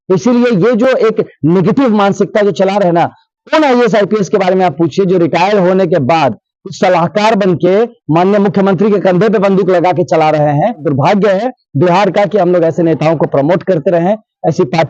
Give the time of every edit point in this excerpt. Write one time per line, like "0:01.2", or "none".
0:10.9